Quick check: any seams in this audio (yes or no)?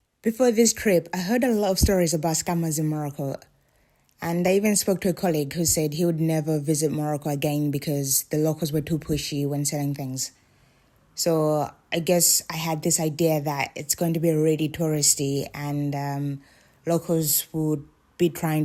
no